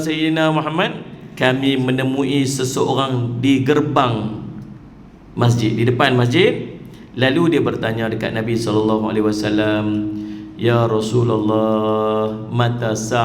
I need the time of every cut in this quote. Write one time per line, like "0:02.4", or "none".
0:01.2